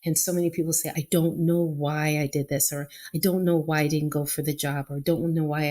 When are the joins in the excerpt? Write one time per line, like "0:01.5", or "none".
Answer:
0:00.9